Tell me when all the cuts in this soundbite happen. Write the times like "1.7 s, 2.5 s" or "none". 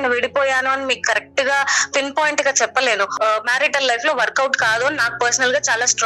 3.2 s